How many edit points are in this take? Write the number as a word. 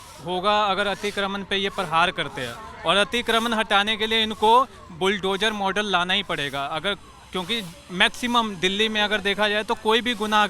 zero